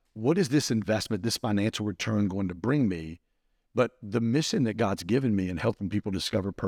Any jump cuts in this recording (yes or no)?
no